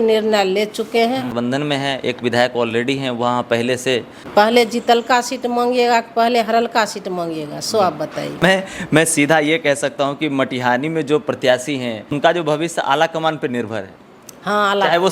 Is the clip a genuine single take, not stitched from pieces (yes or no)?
no